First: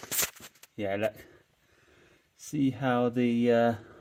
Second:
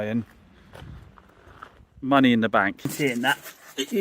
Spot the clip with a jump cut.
second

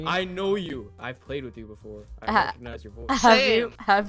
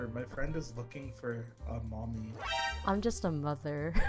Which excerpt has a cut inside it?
first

